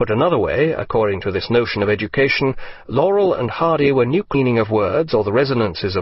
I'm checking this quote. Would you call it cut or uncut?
uncut